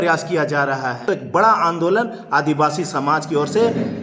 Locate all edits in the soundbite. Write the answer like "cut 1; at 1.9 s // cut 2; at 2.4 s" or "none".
cut 1; at 1.0 s

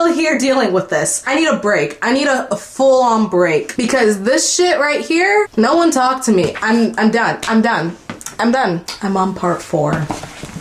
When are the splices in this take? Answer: none

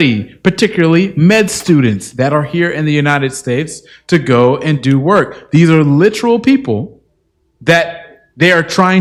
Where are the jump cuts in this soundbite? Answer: none

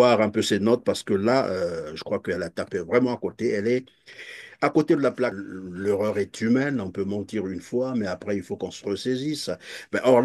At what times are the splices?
cut 1; at 5.4 s

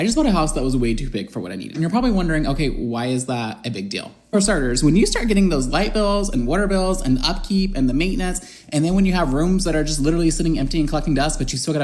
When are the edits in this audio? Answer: none

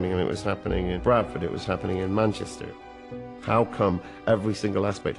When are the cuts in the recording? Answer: cut 1; at 1.0 s // cut 2; at 3.1 s

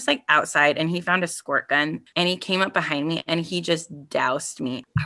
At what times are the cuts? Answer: cut 1; at 2.0 s

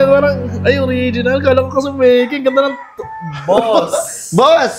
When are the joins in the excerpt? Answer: none

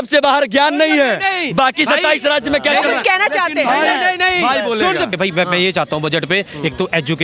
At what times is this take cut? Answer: cut 1; at 5.1 s

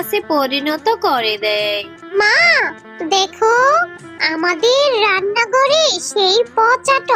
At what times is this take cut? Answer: cut 1; at 2.2 s

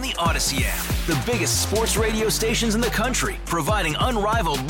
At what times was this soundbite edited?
none

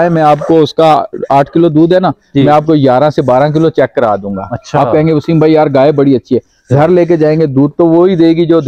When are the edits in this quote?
none

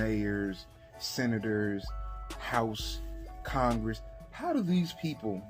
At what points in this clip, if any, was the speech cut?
none

